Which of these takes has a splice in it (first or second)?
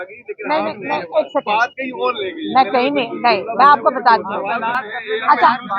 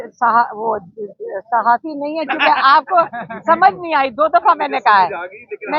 first